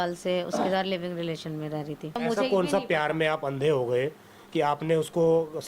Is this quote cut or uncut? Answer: cut